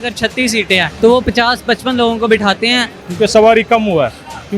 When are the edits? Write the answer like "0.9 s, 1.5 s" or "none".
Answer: 0.9 s, 3.0 s